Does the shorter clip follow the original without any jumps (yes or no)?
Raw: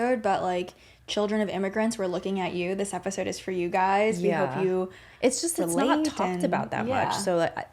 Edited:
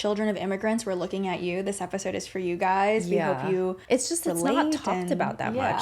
no